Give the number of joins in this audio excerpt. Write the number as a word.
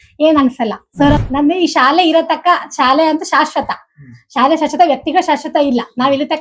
one